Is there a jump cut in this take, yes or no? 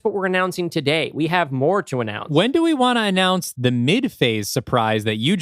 yes